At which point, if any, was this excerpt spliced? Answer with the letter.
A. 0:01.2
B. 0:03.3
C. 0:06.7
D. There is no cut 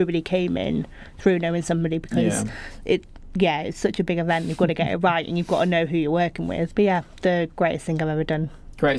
C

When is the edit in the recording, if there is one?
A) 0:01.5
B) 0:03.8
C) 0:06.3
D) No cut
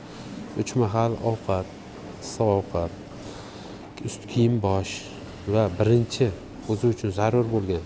D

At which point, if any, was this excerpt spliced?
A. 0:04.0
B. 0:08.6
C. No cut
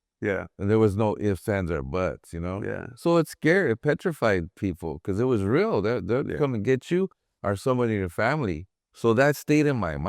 C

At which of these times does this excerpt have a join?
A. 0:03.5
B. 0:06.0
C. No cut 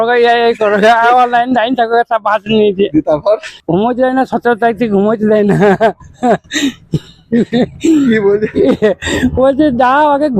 A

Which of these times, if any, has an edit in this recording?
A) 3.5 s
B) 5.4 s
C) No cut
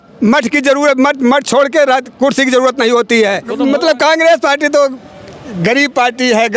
A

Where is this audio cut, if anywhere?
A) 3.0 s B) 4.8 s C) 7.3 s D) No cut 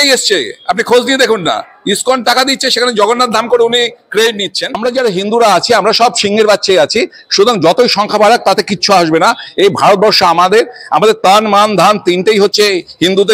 B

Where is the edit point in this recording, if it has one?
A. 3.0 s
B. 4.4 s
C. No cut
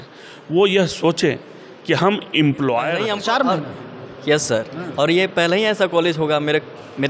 A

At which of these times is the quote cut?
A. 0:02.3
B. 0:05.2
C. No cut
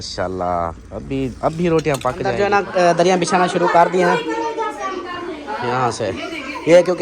A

